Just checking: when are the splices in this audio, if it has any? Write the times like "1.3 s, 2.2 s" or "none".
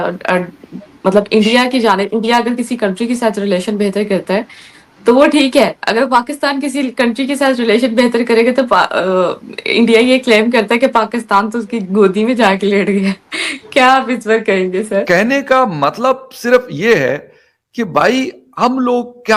15.0 s